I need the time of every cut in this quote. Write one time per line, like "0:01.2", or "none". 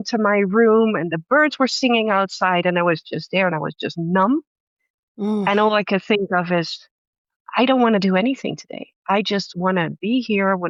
none